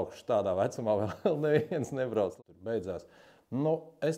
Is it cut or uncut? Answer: cut